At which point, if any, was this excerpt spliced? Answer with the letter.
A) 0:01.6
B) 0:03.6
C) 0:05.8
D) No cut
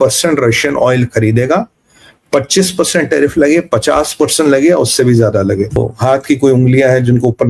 C